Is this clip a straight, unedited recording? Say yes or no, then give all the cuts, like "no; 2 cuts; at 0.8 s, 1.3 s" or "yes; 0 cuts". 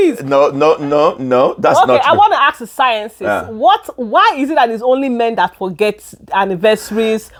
yes; 0 cuts